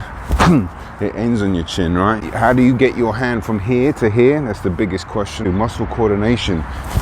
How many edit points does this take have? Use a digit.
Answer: 2